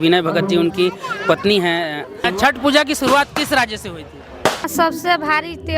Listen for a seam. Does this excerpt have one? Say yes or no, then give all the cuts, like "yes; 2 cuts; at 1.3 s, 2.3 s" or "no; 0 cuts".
yes; 2 cuts; at 2.2 s, 4.7 s